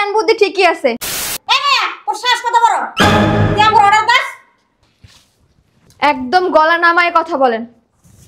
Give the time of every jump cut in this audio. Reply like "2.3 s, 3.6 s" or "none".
1.3 s